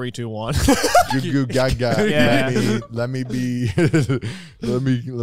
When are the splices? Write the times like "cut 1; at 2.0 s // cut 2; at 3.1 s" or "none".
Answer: cut 1; at 1.1 s

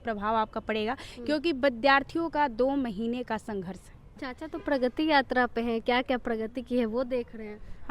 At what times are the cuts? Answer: cut 1; at 4.2 s

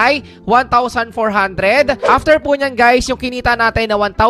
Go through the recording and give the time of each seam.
cut 1; at 2.0 s

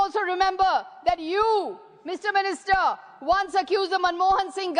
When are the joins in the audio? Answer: none

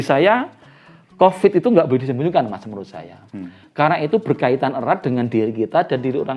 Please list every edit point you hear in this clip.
none

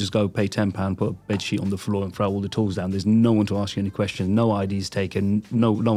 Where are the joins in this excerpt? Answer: none

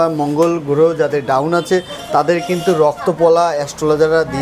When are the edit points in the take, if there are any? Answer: none

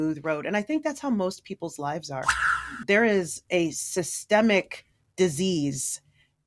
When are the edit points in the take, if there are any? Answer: cut 1; at 2.6 s

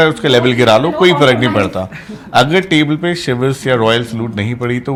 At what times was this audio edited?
none

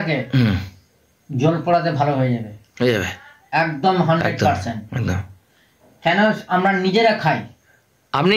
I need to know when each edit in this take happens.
none

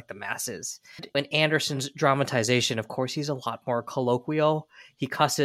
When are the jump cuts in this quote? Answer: cut 1; at 1.0 s

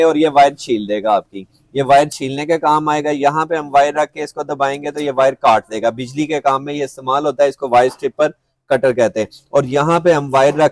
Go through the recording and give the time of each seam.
none

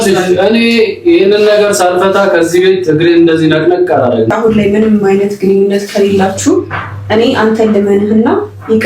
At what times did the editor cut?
cut 1; at 4.3 s

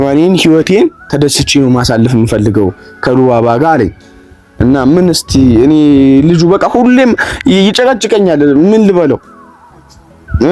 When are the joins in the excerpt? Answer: none

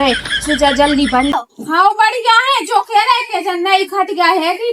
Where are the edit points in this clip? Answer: cut 1; at 1.4 s

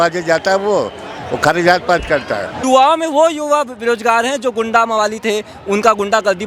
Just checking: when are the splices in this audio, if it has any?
cut 1; at 2.5 s

